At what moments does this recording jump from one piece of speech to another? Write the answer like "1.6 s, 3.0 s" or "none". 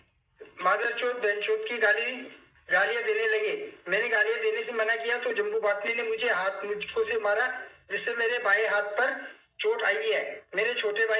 none